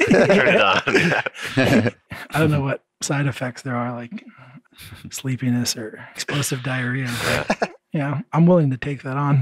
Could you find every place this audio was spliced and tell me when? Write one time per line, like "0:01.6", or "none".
0:02.1
0:04.6
0:06.3
0:07.8